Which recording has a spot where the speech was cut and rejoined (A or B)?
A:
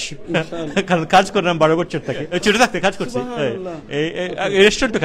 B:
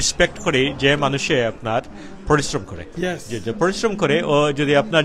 A